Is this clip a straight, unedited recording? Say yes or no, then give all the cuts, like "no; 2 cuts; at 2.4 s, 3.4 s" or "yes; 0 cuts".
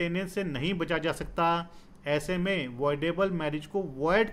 yes; 0 cuts